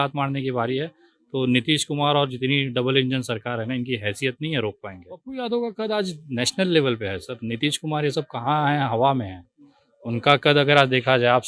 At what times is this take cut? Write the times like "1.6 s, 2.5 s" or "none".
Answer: none